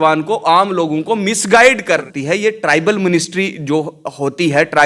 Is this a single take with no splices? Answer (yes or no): yes